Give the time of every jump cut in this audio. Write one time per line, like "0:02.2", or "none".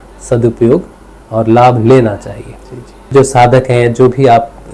0:02.9